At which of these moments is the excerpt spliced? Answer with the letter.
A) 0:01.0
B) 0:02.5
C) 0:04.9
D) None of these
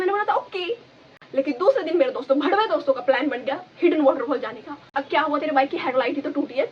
C